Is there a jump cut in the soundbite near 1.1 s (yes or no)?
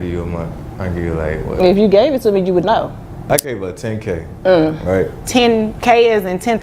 no